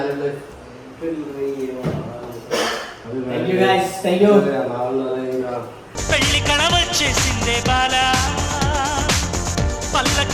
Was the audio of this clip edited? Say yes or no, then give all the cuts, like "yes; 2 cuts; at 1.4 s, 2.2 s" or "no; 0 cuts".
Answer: no; 0 cuts